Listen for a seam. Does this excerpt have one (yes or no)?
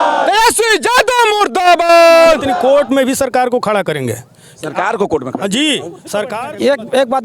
yes